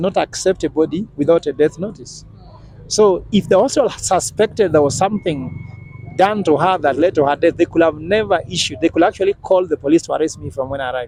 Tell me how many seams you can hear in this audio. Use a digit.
0